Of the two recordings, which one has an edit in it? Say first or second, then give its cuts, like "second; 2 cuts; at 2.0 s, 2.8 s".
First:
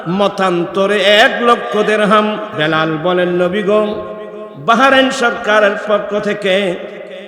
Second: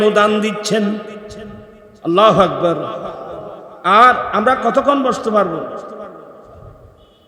first; 1 cut; at 2.5 s